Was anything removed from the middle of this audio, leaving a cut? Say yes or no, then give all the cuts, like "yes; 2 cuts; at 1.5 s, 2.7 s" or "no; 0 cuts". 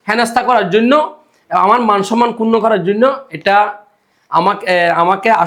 no; 0 cuts